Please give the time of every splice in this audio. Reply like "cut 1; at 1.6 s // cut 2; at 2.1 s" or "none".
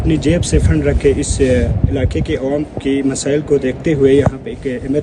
none

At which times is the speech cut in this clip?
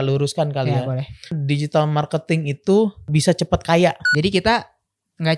cut 1; at 1.4 s // cut 2; at 3.1 s // cut 3; at 4.0 s

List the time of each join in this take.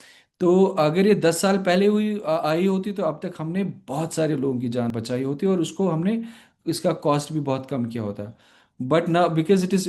cut 1; at 4.9 s

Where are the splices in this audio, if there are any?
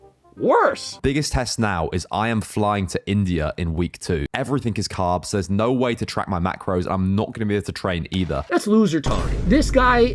cut 1; at 1.0 s

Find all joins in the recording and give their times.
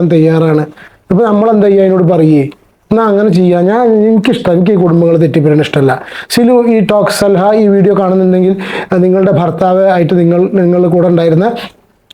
none

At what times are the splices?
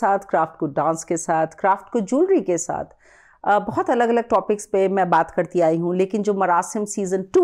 none

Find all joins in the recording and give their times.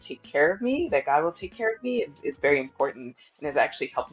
none

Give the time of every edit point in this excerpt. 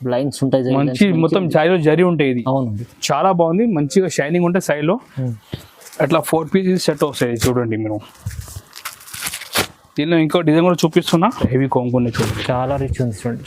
cut 1; at 5.3 s // cut 2; at 11.5 s

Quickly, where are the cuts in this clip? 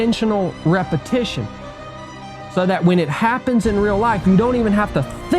cut 1; at 1.9 s

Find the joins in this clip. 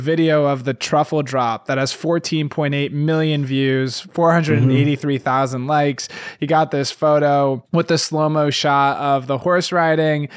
none

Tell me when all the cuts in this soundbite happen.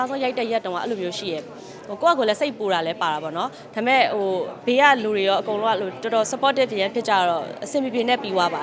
none

